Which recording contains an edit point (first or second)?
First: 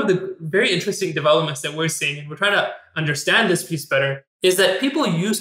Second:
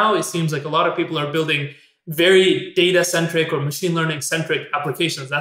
first